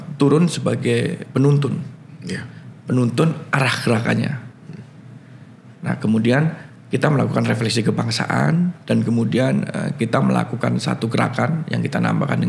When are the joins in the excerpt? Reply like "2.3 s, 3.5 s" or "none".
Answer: none